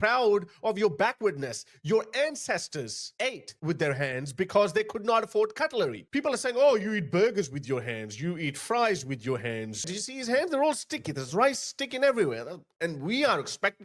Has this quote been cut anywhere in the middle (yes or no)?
yes